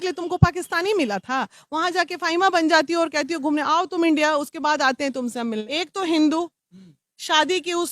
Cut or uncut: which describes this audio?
cut